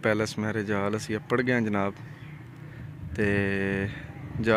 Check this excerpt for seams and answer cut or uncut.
uncut